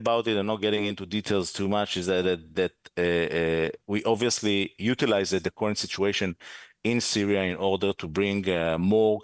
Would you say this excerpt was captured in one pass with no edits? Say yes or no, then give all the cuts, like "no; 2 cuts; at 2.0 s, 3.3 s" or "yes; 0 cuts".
yes; 0 cuts